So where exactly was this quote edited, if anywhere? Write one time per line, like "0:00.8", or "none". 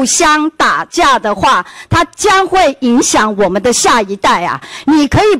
none